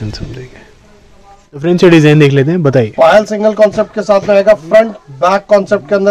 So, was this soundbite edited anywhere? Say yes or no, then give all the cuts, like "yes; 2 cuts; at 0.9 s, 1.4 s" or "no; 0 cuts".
yes; 1 cut; at 1.4 s